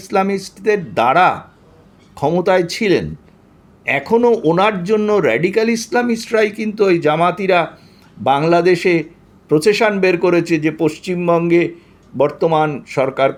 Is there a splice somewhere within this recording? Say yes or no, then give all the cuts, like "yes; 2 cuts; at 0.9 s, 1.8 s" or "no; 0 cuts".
no; 0 cuts